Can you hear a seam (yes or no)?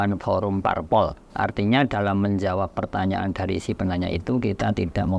yes